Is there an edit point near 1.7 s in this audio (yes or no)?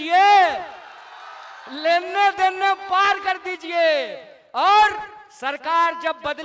no